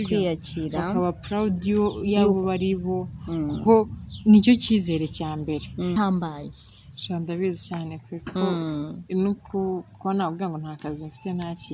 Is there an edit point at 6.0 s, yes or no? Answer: yes